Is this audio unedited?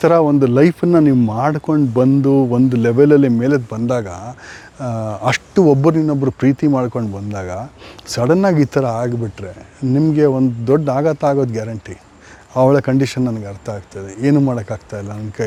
yes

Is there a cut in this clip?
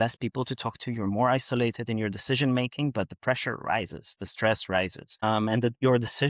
yes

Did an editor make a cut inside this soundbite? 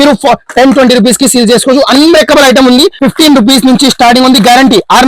yes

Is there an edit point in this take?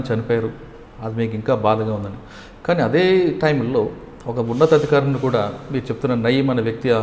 no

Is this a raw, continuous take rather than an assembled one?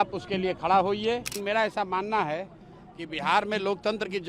no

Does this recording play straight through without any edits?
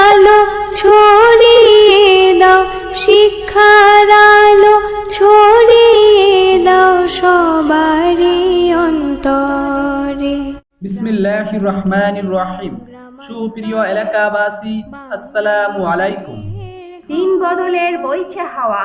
no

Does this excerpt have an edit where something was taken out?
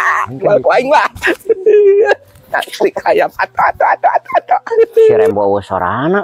yes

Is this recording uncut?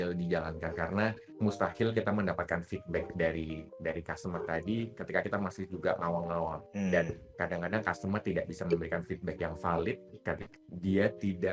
no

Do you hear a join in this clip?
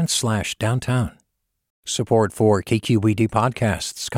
no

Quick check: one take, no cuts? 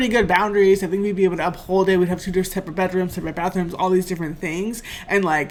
yes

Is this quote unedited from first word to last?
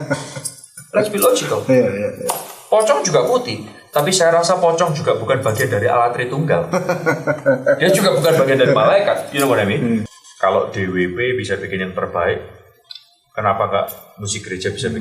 no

